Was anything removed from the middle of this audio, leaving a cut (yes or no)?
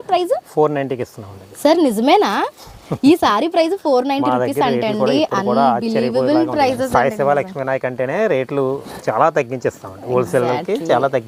no